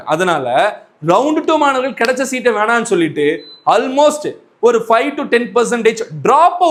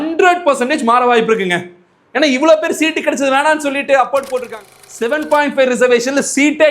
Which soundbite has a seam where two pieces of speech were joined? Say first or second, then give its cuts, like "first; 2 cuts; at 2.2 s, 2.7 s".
second; 1 cut; at 4.5 s